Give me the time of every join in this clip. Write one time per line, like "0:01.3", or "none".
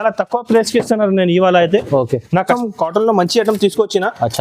0:02.5